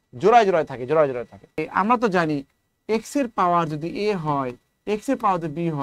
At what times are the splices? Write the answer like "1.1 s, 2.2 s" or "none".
1.6 s